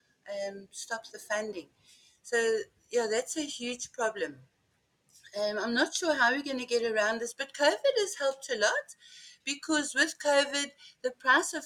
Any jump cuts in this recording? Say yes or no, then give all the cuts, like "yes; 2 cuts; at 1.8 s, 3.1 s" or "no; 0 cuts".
no; 0 cuts